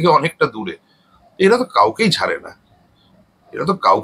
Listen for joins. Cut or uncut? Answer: uncut